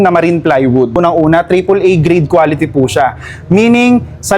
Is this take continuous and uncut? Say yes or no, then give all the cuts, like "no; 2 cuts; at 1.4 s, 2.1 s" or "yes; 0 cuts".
no; 1 cut; at 1.0 s